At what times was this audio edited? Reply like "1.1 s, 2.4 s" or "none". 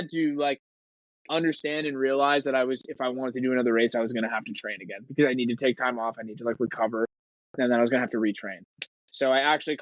none